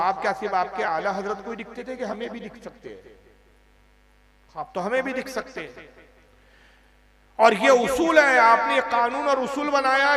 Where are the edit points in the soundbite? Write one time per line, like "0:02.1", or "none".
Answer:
none